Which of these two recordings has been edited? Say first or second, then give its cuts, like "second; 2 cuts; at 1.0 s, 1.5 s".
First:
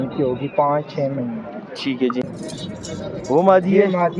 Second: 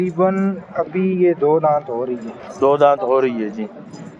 first; 1 cut; at 2.2 s